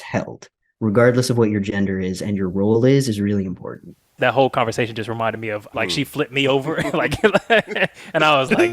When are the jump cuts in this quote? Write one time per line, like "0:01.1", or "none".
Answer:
0:04.2
0:05.7